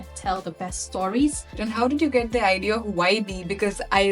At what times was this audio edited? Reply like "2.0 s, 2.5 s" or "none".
1.5 s